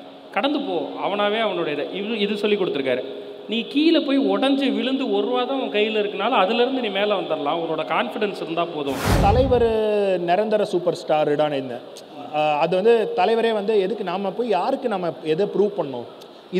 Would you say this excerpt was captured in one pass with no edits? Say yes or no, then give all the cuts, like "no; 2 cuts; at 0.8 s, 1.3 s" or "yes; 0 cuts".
no; 1 cut; at 9.2 s